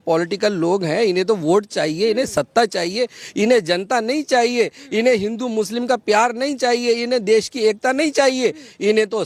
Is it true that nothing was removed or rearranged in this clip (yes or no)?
yes